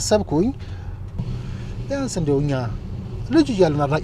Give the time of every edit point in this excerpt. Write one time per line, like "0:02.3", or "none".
0:01.2